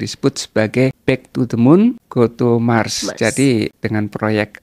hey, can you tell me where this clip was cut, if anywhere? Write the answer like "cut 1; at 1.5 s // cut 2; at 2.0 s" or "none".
cut 1; at 1.0 s // cut 2; at 2.0 s